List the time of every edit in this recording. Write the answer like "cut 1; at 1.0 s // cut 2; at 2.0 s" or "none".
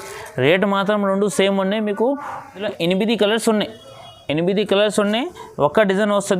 cut 1; at 2.6 s